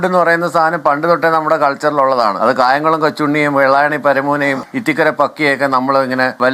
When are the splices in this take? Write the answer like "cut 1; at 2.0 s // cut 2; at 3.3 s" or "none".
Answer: cut 1; at 2.4 s